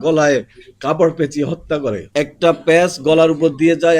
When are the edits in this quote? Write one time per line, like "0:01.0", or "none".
0:02.0